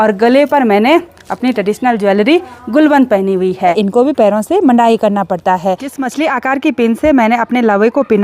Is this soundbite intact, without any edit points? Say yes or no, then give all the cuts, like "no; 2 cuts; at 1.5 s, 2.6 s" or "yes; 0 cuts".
no; 2 cuts; at 3.8 s, 6.0 s